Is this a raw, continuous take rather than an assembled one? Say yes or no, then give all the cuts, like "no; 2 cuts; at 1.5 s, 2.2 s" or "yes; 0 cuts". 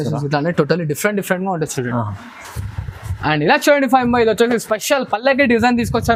yes; 0 cuts